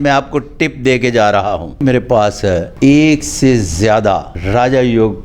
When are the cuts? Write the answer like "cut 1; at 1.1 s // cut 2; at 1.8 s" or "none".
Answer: cut 1; at 1.8 s // cut 2; at 2.7 s // cut 3; at 4.3 s